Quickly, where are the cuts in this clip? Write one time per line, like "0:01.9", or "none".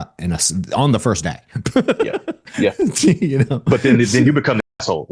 none